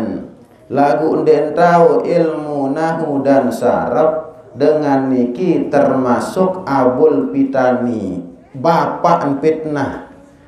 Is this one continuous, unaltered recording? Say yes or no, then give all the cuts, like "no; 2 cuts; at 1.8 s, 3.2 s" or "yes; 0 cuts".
yes; 0 cuts